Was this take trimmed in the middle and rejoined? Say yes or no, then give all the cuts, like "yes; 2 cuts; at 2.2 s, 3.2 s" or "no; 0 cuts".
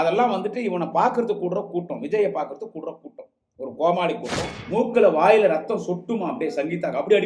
yes; 1 cut; at 4.5 s